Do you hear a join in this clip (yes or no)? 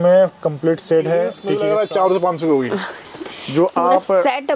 yes